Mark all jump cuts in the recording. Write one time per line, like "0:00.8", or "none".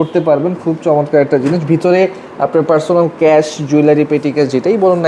none